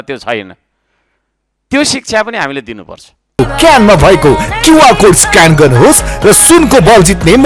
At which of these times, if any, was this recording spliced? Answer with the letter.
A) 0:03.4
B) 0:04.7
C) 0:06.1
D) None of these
A